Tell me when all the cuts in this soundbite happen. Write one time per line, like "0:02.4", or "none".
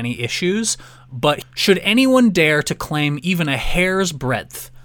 0:01.4